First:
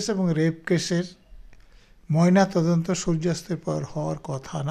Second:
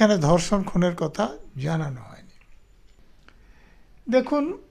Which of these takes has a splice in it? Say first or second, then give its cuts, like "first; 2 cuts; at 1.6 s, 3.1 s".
second; 1 cut; at 3.0 s